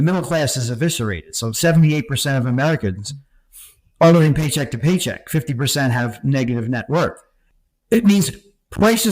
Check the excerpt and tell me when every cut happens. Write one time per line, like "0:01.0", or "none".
0:07.6